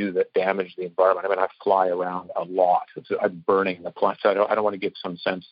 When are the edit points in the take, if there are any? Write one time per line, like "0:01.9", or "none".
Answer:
0:04.2